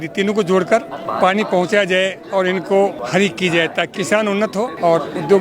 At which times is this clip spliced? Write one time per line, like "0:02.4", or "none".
0:01.0
0:03.0
0:04.4